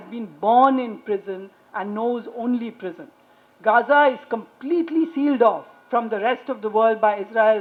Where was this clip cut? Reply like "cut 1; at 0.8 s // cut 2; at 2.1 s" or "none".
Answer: none